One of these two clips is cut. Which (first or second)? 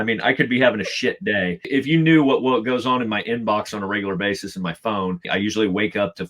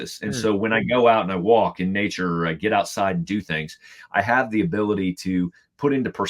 first